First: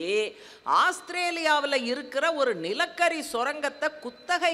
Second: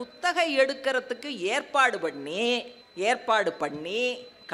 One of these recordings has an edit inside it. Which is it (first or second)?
second